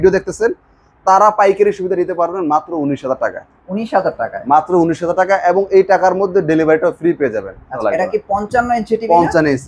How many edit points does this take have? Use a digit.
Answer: 1